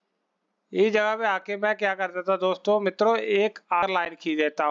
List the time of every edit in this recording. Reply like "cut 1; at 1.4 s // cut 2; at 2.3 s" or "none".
cut 1; at 3.8 s